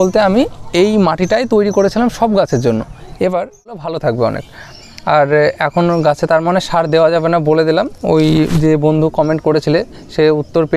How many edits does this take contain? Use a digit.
1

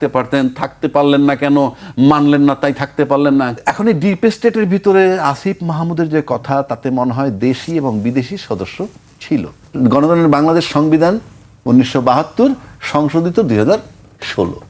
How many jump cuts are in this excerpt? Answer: 2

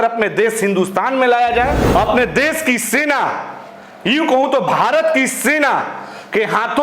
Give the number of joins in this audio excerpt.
1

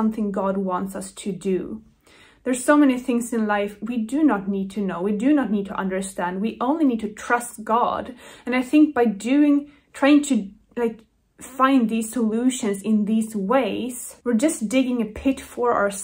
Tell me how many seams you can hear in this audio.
0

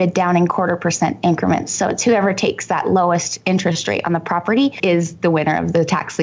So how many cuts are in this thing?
1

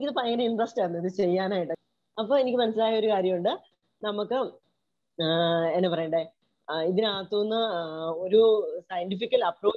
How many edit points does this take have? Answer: 1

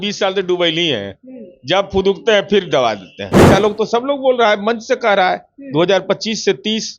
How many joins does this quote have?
1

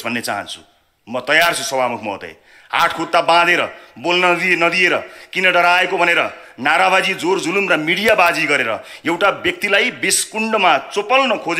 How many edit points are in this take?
0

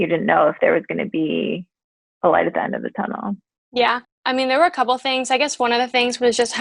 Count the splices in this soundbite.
1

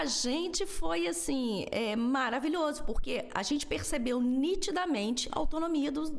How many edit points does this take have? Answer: 0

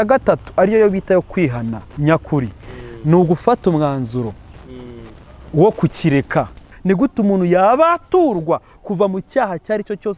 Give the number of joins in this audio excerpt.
1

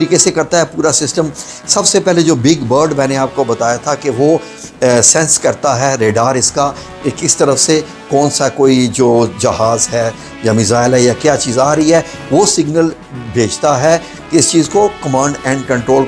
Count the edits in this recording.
0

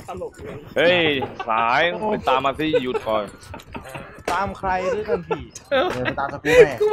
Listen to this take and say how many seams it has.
0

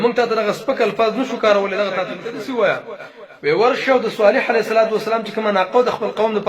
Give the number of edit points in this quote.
1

